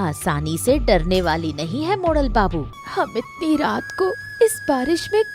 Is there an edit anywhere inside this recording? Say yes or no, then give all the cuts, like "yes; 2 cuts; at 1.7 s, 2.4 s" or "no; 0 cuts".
yes; 1 cut; at 2.8 s